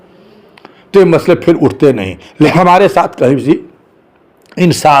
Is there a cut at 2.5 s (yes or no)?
yes